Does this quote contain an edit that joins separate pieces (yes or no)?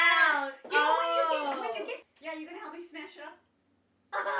yes